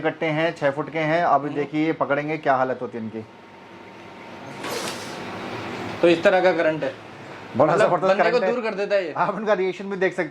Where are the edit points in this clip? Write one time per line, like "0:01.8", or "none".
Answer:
none

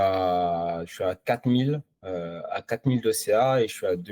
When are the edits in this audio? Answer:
none

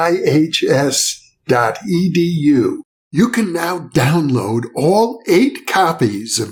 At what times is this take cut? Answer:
none

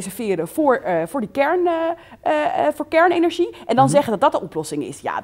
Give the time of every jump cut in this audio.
none

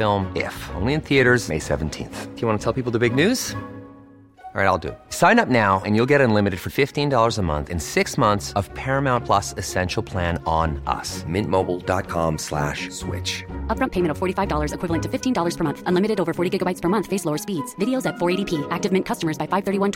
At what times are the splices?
none

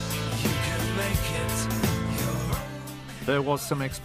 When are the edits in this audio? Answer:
0:02.3

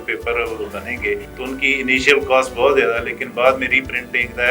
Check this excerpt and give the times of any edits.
0:01.3

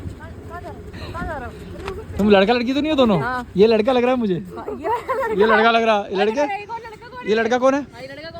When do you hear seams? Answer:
none

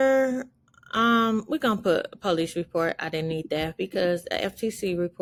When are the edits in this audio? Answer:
none

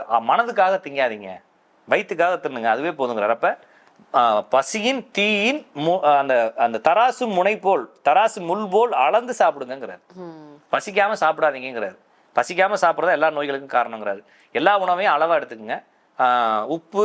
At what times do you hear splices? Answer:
none

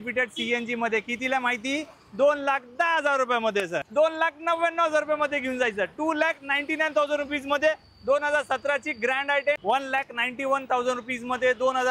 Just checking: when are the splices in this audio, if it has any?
0:03.8
0:09.6

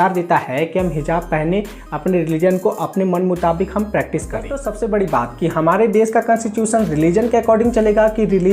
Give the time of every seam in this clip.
0:04.6

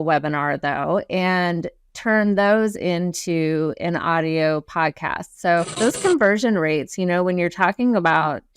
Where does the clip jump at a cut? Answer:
0:05.7

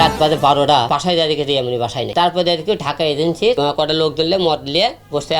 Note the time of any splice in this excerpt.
0:00.9
0:02.1
0:03.6

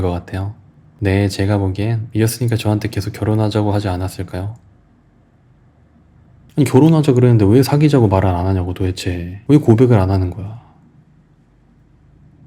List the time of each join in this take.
0:02.0
0:06.4

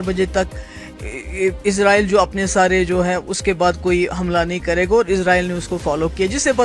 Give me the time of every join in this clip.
none

